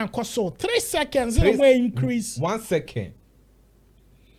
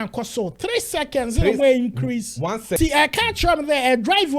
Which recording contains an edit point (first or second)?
second